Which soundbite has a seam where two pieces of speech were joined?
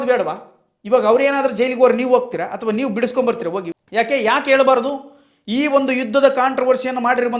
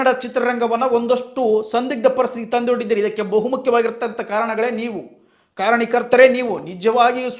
first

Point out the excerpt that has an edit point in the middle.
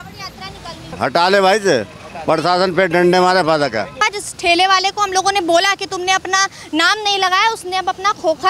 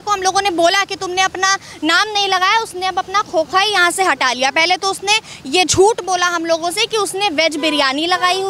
first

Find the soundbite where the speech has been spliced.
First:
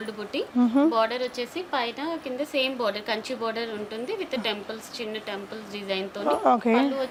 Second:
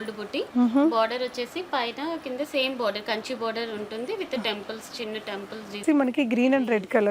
second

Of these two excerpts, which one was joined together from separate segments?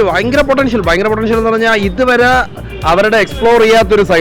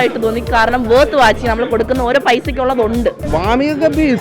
second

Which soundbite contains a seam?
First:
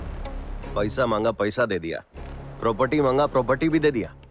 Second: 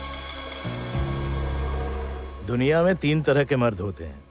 second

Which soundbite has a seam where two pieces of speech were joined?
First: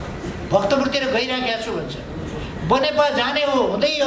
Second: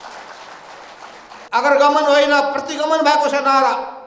second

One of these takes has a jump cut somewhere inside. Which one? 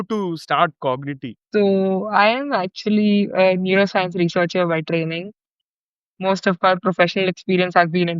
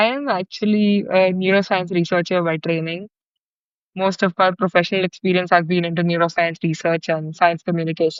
first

